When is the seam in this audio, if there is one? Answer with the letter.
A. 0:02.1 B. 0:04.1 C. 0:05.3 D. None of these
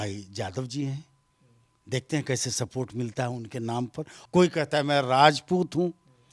B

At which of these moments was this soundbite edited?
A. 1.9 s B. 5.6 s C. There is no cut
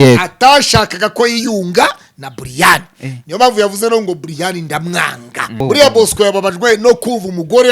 B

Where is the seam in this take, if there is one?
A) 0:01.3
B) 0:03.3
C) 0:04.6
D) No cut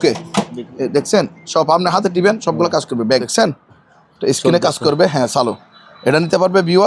B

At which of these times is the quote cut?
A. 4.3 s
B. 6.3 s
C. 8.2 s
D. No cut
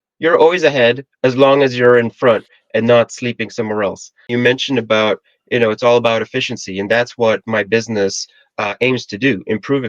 A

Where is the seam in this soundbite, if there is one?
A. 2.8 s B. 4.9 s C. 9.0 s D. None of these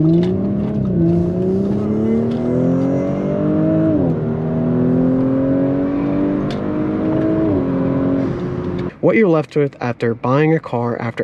C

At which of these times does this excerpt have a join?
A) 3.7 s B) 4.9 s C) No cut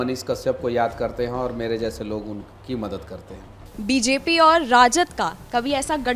A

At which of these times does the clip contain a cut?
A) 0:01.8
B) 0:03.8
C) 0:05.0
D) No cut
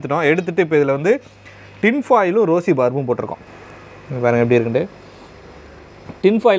D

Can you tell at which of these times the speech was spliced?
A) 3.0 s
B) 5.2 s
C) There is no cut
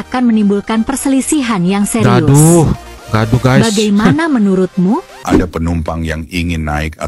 B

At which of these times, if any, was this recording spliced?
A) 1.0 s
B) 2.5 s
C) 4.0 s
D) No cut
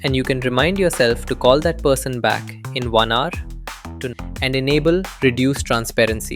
C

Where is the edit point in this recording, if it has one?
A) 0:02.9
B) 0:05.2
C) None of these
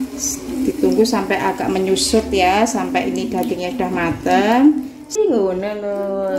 B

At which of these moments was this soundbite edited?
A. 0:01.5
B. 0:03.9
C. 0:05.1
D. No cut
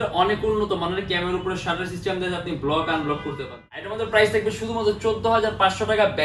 B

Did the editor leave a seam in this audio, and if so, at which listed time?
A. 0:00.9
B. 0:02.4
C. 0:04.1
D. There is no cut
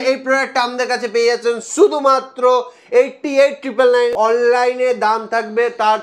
C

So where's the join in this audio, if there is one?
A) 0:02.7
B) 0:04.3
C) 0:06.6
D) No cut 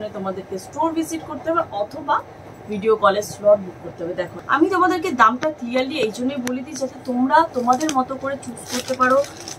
B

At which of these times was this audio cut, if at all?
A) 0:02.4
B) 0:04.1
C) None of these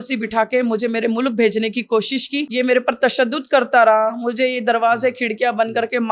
A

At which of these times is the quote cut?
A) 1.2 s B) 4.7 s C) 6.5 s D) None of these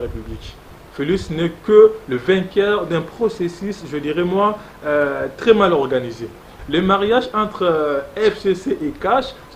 C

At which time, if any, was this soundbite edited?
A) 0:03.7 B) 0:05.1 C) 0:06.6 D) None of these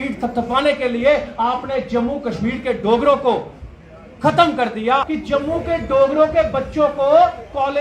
B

